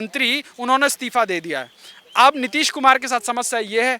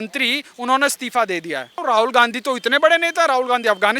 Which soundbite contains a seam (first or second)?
second